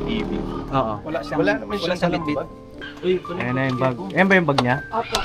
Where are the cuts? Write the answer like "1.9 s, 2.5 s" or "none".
2.6 s